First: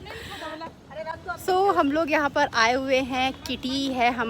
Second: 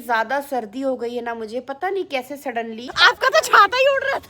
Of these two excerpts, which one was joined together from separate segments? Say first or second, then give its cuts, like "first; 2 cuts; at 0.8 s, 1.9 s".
second; 1 cut; at 3.2 s